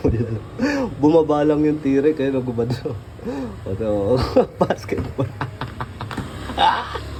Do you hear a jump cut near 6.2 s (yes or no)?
no